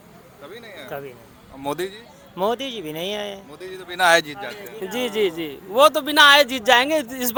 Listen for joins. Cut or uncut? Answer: uncut